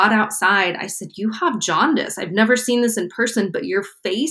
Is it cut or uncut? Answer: uncut